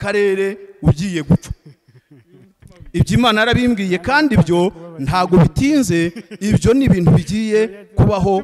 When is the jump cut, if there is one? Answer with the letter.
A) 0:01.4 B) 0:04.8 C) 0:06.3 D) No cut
D